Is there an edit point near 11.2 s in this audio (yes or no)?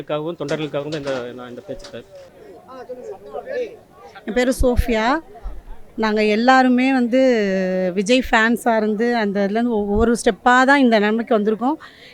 no